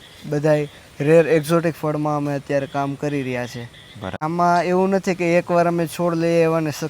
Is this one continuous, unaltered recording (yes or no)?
no